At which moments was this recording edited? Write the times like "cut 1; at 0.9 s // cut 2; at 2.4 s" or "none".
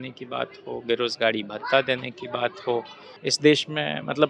cut 1; at 3.0 s